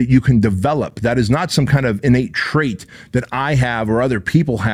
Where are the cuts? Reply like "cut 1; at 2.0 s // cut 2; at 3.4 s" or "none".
none